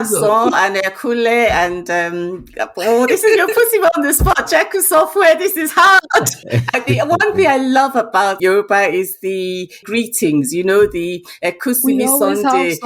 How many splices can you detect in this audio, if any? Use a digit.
3